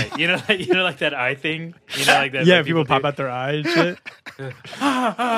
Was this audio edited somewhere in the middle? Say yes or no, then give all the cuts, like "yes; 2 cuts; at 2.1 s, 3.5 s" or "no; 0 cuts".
no; 0 cuts